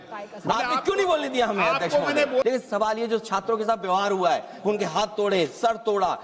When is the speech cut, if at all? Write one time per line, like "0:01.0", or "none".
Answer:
0:02.4